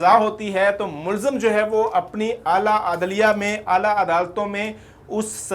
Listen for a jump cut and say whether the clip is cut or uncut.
uncut